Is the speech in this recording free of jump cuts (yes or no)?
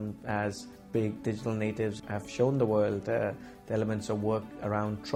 yes